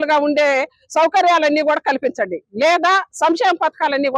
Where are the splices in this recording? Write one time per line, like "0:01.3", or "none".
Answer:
0:02.6